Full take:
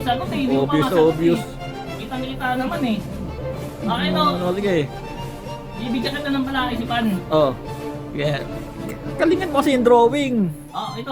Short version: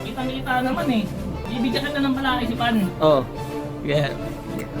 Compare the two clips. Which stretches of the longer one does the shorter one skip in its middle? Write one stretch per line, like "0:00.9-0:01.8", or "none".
0:03.3-0:05.7